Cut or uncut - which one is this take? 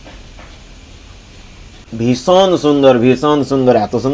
cut